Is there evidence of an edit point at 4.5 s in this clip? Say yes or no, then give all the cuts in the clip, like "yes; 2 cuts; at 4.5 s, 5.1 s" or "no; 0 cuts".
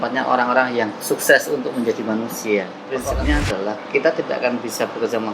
no; 1 cut; at 2.8 s